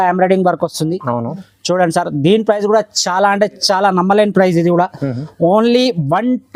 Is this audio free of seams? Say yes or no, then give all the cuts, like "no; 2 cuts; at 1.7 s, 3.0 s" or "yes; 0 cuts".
yes; 0 cuts